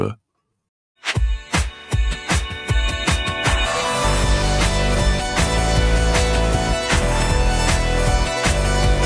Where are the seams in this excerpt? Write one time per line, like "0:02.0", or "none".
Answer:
0:01.1